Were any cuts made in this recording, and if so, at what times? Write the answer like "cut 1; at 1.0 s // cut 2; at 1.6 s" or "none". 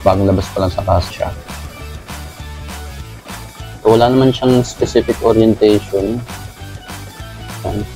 cut 1; at 1.1 s